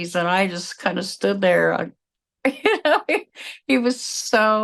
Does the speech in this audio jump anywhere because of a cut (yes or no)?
no